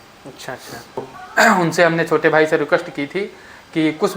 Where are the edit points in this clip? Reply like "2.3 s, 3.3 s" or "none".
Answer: 1.2 s